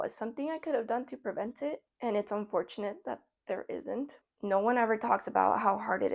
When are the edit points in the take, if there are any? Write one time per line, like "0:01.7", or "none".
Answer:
0:01.9
0:04.2